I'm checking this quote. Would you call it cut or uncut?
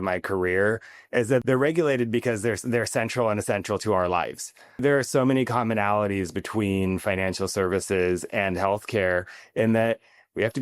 cut